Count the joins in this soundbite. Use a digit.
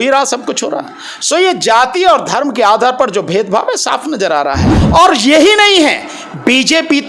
1